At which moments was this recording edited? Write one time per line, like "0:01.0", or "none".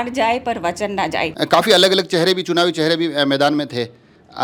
0:01.3